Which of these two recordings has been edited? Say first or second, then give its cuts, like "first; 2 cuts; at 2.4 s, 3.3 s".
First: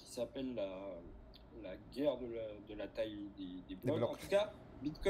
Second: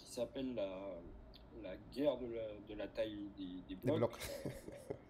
first; 1 cut; at 4.2 s